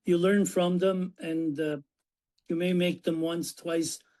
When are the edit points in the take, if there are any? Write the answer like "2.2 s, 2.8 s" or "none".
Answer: none